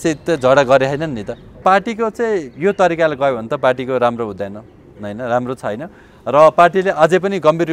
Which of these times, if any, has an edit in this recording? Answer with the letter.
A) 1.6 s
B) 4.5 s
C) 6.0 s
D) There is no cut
A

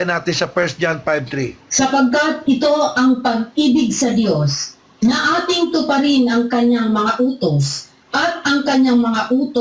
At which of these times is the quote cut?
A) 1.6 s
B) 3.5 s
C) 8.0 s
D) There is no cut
A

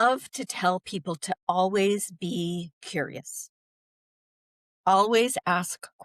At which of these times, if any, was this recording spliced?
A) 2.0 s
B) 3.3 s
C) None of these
C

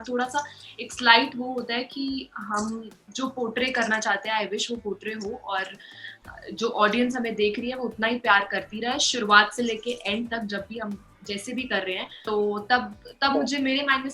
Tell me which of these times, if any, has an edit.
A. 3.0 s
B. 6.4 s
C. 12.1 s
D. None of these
C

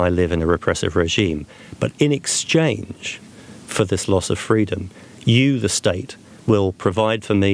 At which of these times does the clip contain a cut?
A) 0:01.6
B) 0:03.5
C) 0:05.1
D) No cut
D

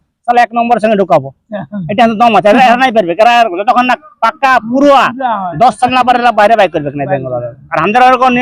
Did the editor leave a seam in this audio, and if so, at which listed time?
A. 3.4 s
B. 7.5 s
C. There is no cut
C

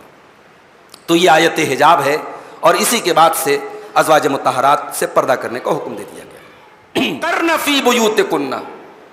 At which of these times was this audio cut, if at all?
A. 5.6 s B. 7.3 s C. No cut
B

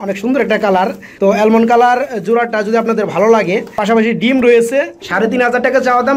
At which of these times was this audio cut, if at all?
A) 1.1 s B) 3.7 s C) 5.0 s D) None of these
C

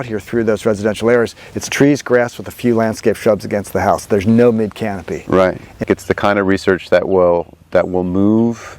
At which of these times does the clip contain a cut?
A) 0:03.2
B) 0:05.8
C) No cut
B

